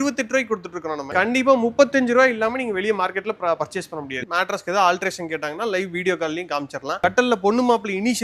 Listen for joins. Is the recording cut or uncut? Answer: cut